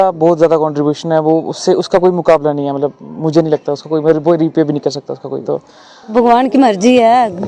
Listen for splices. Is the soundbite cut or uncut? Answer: cut